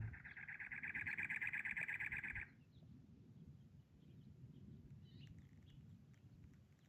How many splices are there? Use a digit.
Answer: 0